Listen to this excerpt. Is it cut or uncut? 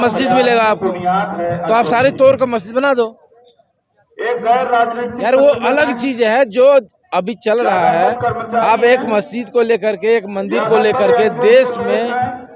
uncut